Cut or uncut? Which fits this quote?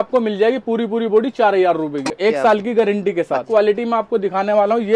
cut